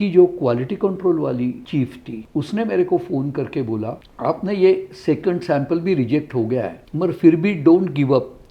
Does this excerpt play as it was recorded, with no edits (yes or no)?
no